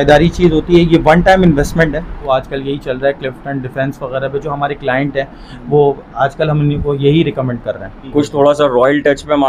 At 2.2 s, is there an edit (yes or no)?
yes